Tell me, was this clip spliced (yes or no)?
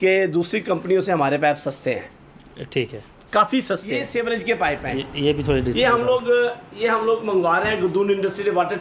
yes